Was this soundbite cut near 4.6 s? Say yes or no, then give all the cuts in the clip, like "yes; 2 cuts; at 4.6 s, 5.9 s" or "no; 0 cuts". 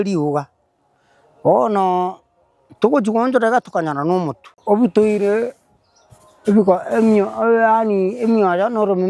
yes; 1 cut; at 4.6 s